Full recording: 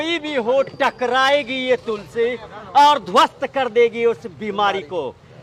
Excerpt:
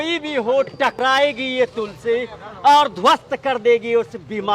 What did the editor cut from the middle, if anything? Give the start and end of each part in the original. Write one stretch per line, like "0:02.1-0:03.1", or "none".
0:01.0-0:01.1